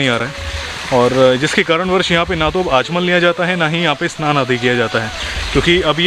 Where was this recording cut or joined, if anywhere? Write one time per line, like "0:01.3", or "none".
none